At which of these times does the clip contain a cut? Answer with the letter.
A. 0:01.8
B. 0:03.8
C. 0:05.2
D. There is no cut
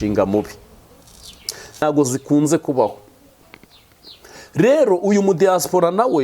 A